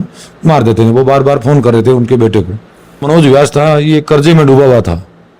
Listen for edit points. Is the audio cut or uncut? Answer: cut